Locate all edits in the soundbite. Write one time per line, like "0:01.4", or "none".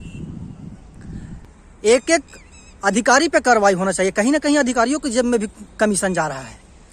0:01.4